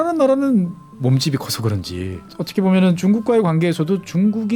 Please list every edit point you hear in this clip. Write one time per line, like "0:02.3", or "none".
0:00.9
0:02.4